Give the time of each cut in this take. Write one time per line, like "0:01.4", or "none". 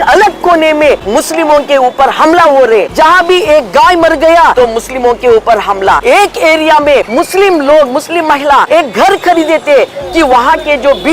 0:01.0
0:02.9
0:04.5
0:06.0
0:07.1
0:08.7